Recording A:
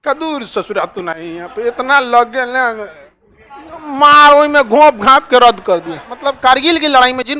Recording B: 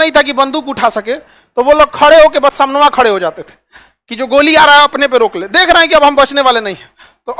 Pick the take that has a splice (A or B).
A